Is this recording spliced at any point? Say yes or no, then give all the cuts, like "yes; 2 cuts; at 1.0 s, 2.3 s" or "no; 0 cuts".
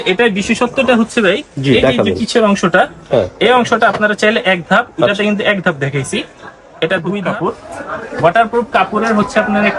yes; 1 cut; at 7.2 s